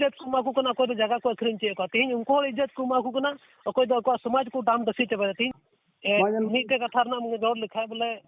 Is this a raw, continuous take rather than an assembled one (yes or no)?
no